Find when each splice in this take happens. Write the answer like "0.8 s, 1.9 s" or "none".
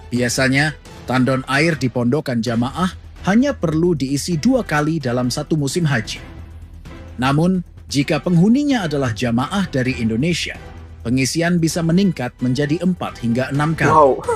none